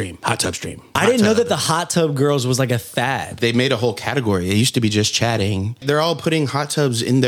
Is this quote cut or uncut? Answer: cut